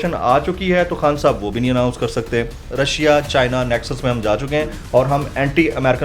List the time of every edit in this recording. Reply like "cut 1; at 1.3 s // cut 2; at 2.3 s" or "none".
cut 1; at 2.6 s